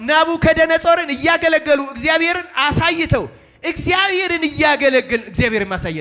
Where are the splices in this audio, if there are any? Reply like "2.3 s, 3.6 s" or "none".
none